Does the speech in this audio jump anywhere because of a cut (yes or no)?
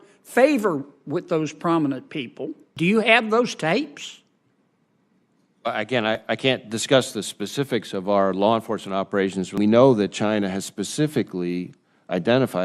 yes